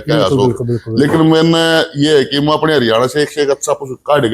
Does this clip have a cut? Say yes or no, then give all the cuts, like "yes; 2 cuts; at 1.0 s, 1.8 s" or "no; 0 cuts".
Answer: no; 0 cuts